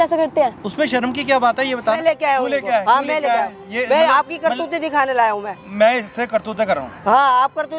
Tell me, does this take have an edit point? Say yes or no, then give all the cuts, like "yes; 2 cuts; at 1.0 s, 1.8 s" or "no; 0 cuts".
yes; 1 cut; at 2.0 s